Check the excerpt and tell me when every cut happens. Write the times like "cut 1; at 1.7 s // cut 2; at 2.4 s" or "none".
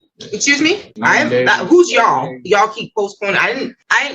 cut 1; at 1.0 s